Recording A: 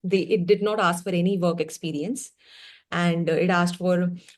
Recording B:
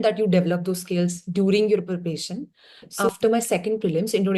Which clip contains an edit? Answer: B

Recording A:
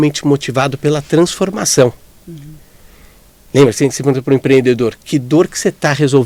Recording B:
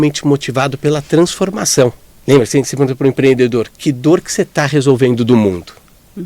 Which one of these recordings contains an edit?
B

